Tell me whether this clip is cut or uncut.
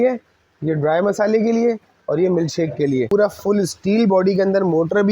cut